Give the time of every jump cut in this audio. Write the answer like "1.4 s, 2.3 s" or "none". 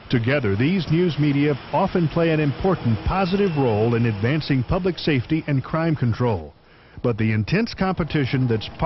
6.5 s